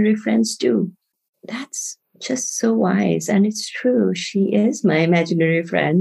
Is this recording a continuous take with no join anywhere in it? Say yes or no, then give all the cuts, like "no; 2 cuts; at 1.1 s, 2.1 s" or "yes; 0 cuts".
no; 1 cut; at 1.1 s